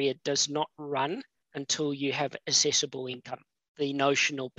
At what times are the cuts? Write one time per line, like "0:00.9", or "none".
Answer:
none